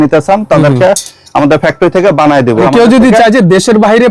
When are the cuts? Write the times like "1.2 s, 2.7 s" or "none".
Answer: 2.7 s

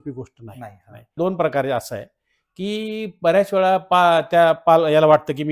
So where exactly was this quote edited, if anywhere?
1.1 s

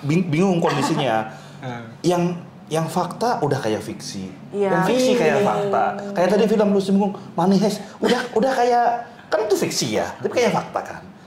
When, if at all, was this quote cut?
none

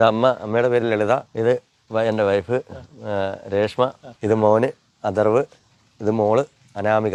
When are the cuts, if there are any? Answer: none

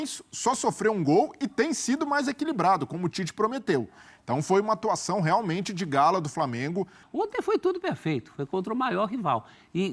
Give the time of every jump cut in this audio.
7.0 s

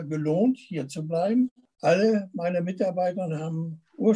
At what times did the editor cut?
1.7 s

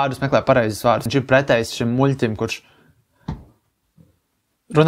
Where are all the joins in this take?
1.0 s

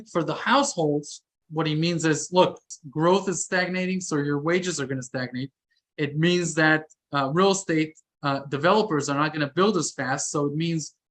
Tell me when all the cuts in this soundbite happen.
1.4 s, 2.7 s

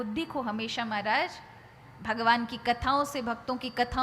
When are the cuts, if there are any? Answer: none

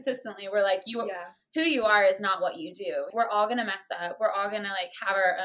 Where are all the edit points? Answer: 3.1 s

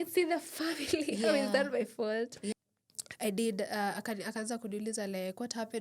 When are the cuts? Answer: 2.5 s

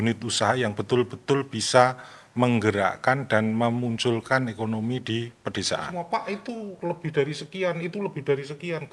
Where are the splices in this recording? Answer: 5.9 s

